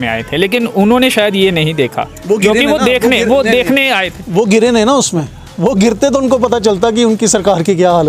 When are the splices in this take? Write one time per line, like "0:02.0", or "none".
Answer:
none